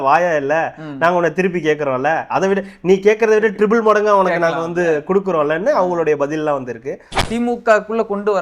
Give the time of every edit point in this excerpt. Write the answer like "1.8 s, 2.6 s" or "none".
7.2 s